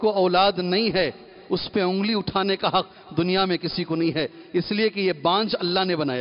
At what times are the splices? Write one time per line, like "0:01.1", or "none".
none